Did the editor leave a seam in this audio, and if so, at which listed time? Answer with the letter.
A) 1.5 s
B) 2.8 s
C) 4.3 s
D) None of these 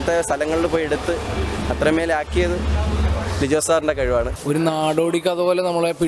C